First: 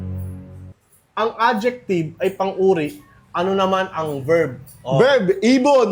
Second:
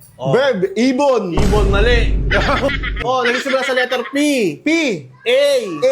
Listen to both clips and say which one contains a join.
second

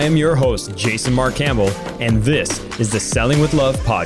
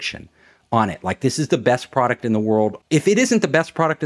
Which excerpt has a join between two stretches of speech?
second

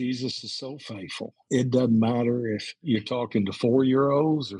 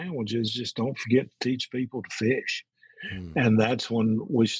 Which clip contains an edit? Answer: first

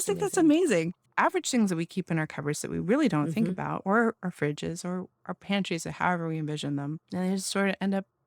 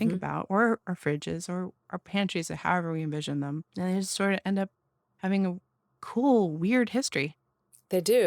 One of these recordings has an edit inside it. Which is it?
first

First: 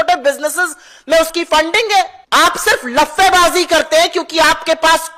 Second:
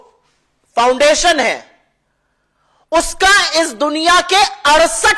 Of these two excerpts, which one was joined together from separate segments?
first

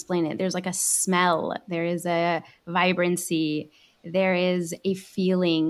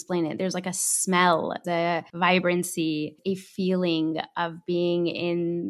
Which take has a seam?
second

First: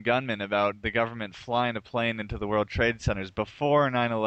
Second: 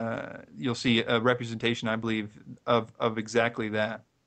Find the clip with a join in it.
first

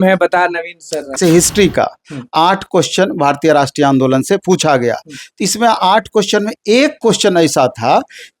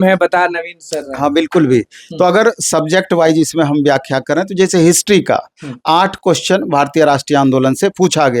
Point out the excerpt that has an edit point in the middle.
first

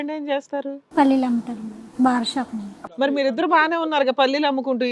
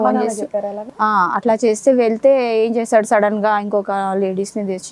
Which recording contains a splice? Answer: first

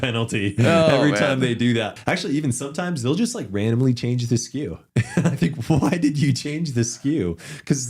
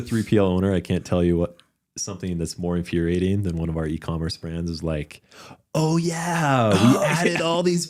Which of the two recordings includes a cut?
first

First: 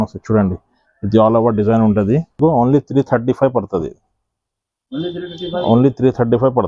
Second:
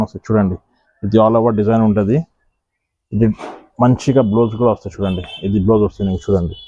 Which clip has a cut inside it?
first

